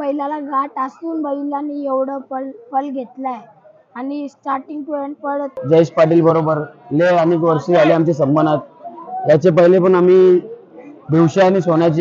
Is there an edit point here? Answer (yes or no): yes